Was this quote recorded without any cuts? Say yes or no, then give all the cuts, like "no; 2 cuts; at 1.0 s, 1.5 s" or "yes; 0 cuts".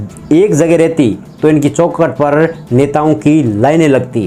yes; 0 cuts